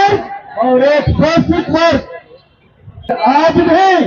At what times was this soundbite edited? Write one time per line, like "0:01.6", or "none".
0:03.1